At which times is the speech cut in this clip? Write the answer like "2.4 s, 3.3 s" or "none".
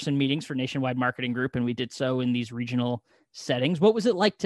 none